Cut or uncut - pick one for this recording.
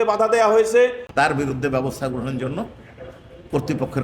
cut